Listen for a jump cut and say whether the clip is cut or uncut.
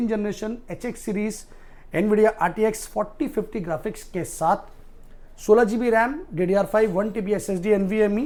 uncut